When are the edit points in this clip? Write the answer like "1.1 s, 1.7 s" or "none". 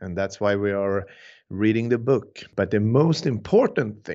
2.4 s